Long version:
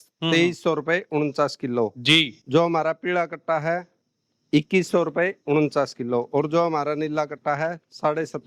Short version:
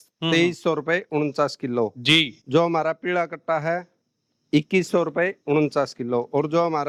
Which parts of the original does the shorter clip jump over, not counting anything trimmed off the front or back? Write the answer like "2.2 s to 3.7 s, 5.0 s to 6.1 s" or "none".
none